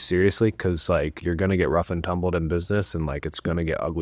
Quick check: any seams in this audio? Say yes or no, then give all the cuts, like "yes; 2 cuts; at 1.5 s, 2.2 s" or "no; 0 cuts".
no; 0 cuts